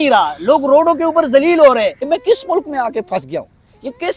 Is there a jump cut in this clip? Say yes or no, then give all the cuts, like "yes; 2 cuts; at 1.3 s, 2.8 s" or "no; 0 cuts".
yes; 1 cut; at 2.0 s